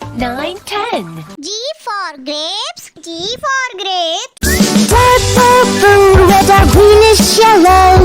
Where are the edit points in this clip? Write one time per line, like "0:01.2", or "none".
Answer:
0:01.4